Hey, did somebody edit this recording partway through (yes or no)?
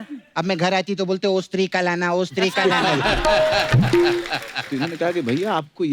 yes